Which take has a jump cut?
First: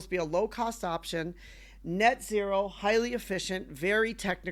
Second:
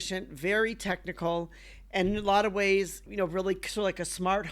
second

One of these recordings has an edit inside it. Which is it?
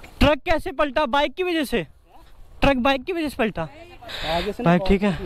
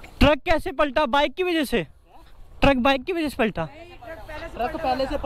first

